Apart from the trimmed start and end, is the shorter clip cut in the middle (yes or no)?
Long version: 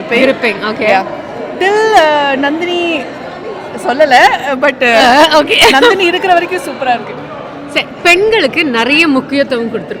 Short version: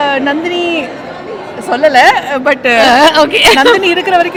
no